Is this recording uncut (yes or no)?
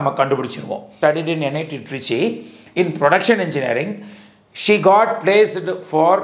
no